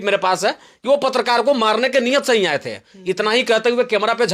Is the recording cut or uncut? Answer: uncut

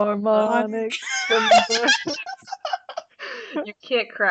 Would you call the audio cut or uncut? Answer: uncut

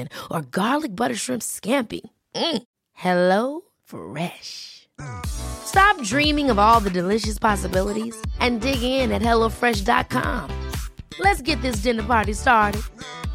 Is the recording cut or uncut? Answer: uncut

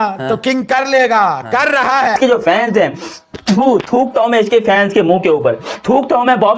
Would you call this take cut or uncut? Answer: cut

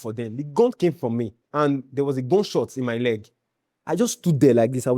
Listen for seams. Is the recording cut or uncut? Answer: cut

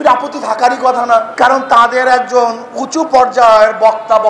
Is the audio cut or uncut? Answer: cut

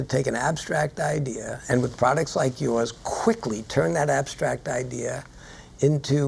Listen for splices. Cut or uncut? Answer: uncut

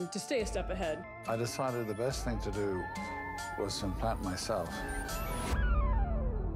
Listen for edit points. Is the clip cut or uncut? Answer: uncut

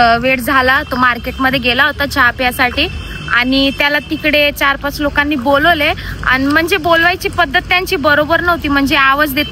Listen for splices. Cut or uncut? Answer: uncut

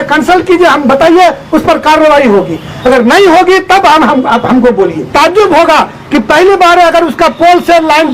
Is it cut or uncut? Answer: cut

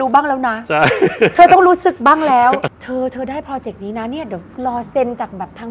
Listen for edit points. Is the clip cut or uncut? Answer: cut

